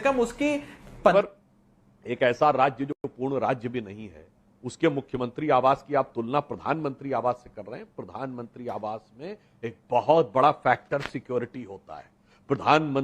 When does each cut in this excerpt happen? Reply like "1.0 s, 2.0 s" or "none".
1.1 s